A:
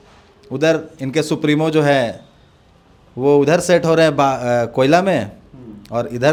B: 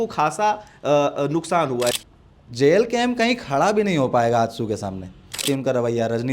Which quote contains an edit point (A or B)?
B